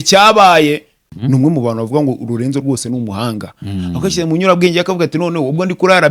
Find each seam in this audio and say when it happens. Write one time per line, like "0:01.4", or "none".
0:01.0